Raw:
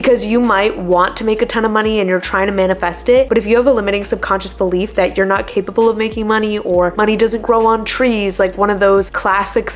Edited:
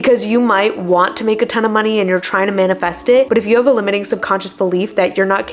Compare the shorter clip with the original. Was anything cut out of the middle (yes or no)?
no